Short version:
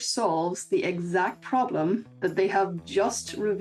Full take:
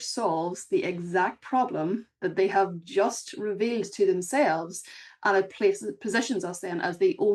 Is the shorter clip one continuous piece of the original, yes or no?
yes